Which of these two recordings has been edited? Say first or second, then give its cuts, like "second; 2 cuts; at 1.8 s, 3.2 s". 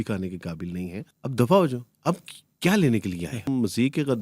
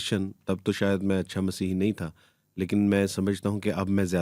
first; 2 cuts; at 1.1 s, 3.5 s